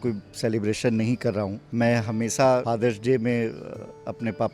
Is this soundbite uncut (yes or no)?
no